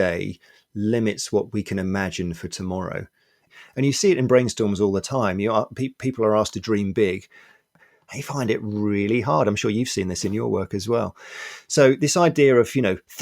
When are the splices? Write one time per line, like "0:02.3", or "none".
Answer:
0:03.5
0:07.9